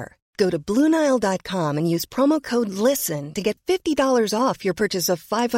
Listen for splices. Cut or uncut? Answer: uncut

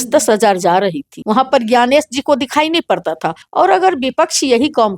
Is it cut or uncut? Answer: cut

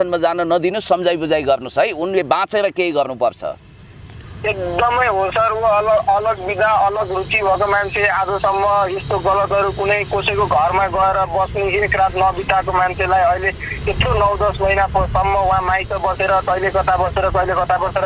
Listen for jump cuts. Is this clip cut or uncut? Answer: uncut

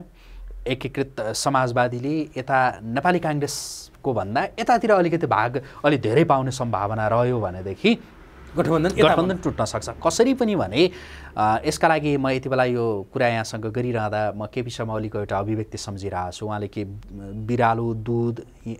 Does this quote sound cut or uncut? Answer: uncut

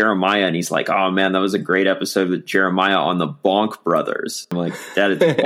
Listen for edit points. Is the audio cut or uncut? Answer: cut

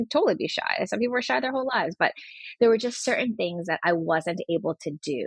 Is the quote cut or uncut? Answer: uncut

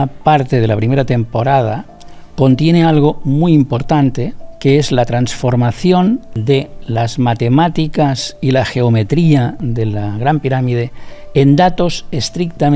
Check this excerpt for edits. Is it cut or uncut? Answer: cut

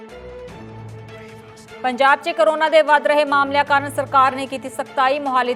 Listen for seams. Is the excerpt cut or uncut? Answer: uncut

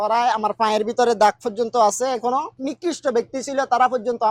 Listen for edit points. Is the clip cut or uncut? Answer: cut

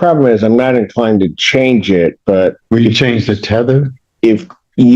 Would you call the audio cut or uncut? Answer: cut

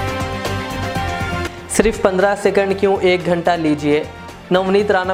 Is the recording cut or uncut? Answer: uncut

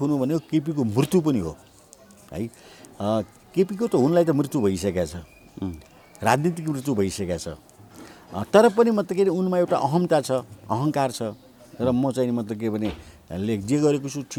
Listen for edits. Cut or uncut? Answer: uncut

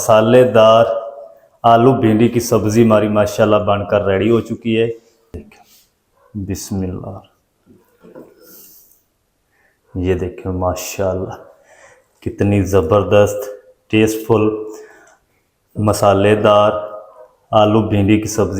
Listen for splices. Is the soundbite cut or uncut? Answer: cut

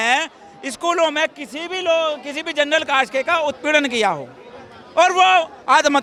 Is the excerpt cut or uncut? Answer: uncut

